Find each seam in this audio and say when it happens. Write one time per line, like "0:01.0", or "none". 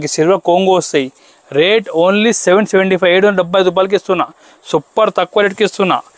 none